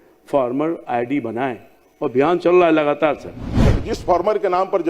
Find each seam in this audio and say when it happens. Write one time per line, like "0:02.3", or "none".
0:03.7